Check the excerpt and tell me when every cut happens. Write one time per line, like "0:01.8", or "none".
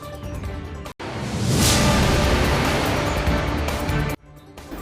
0:00.9